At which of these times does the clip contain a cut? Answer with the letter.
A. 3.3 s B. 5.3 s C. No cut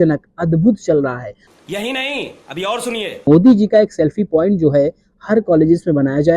A